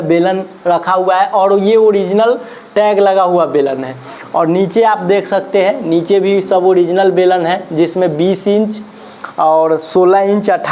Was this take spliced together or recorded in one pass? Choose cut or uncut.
uncut